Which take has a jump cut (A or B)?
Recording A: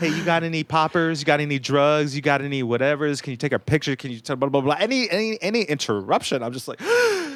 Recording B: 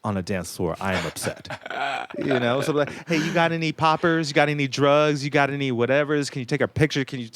B